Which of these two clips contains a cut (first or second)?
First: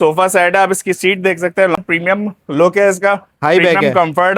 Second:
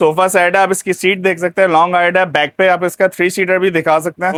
first